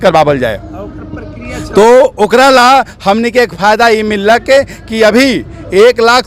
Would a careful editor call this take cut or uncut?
uncut